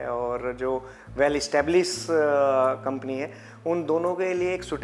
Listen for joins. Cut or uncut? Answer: uncut